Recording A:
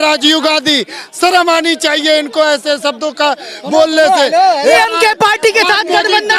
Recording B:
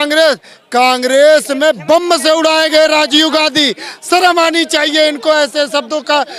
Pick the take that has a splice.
A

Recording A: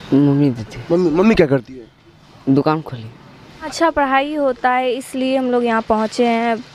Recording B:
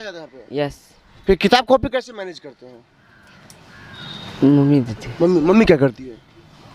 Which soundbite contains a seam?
A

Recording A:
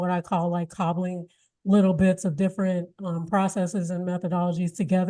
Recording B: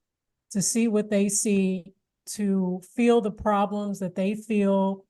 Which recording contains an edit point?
B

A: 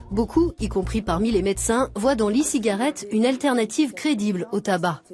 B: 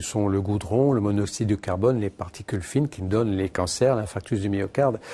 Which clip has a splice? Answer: A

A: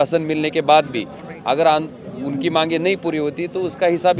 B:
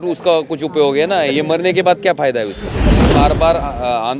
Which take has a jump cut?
B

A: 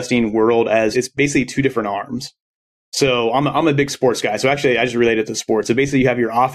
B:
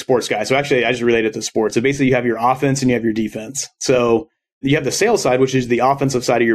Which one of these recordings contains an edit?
A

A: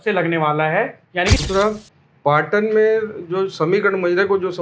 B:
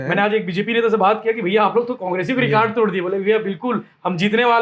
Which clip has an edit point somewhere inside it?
A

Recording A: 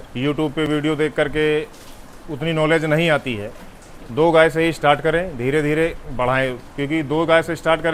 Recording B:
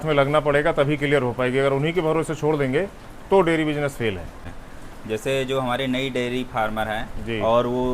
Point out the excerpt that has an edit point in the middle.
B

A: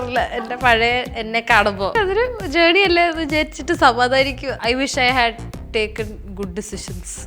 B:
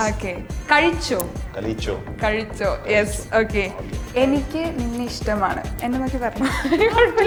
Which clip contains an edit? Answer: A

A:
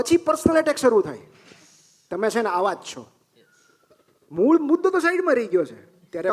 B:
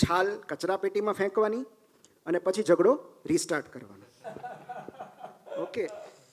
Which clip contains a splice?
B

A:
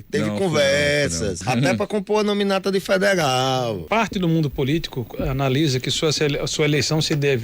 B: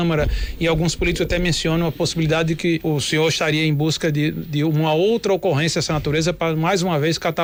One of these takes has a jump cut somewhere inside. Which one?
A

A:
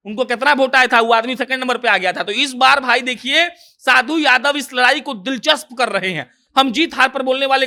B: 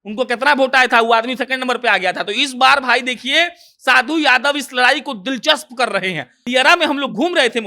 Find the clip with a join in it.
B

